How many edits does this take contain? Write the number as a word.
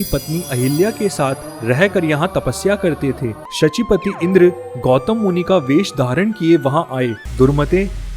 two